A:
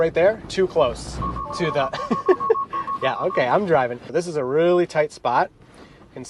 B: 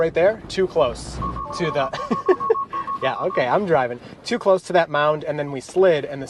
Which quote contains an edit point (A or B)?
A